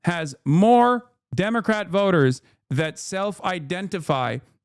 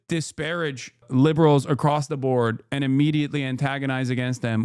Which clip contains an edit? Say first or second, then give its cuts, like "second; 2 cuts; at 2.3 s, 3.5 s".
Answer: second; 1 cut; at 1.0 s